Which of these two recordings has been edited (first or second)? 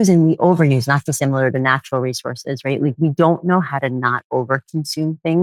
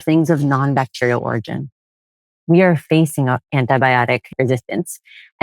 second